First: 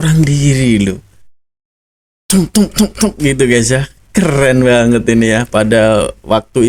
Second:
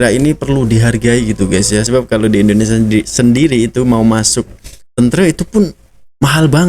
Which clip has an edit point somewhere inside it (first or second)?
second